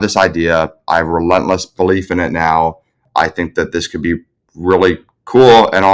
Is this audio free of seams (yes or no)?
no